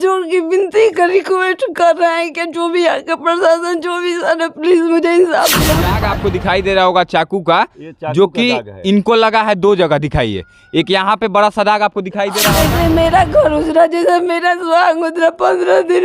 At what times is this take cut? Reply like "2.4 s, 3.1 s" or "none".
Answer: 6.0 s, 12.6 s